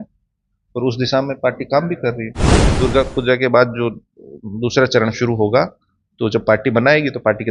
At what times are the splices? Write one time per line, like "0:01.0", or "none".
0:02.8